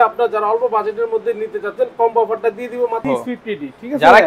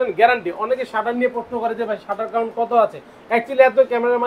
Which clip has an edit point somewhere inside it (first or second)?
first